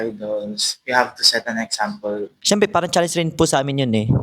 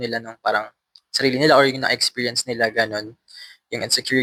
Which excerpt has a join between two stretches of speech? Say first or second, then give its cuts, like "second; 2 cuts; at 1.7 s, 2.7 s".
first; 1 cut; at 2.4 s